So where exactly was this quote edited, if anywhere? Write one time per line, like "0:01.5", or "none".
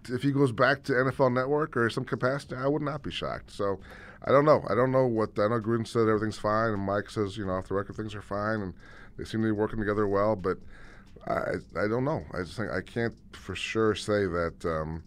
0:03.4